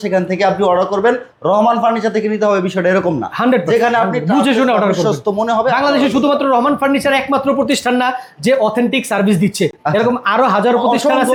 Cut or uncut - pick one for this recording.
uncut